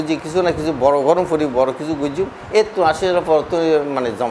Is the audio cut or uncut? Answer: uncut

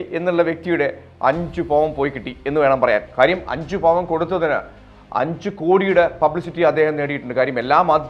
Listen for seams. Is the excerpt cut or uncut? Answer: uncut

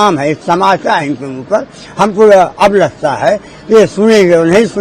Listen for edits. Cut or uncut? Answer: uncut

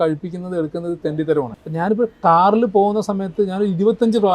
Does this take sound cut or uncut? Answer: cut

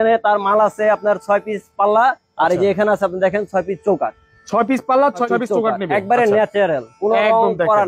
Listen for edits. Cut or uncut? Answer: uncut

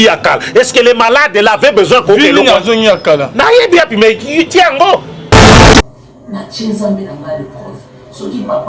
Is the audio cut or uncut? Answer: cut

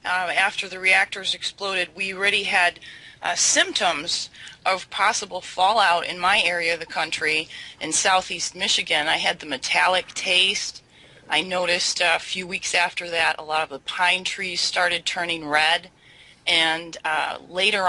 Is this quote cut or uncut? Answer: cut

